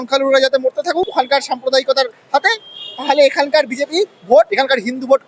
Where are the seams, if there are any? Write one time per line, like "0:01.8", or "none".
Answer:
0:01.1
0:04.5